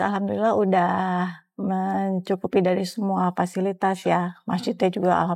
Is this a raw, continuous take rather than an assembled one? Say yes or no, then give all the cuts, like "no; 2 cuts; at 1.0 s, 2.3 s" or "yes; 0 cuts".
yes; 0 cuts